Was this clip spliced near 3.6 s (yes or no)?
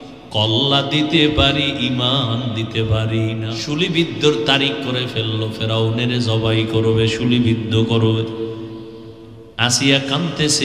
yes